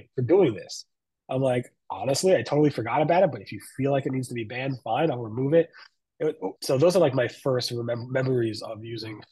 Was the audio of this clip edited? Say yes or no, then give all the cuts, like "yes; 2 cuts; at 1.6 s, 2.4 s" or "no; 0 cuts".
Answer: yes; 1 cut; at 6.5 s